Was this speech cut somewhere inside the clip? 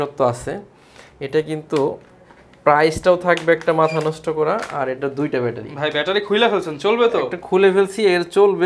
no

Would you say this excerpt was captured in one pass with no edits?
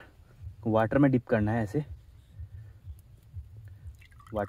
yes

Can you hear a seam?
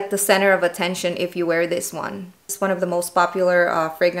yes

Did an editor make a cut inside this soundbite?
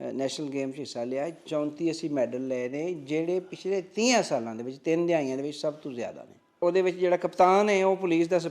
yes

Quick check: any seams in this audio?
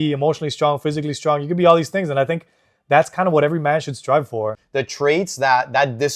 yes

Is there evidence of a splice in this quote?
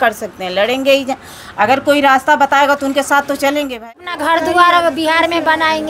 yes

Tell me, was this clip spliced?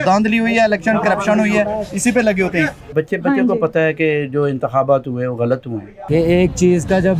yes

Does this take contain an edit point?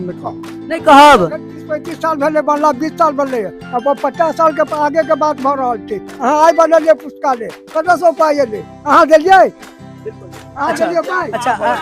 yes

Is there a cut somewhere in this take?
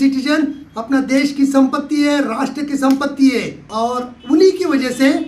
yes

